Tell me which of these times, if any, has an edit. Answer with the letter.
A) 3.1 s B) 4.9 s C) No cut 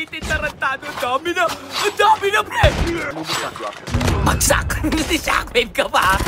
A